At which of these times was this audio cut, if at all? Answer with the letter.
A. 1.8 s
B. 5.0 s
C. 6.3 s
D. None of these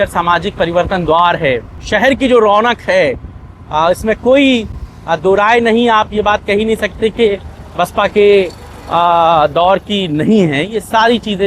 A